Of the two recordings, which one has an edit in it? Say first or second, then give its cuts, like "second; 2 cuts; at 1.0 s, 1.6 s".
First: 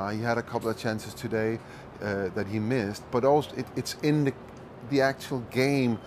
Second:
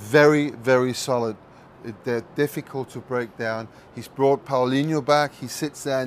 first; 1 cut; at 3.4 s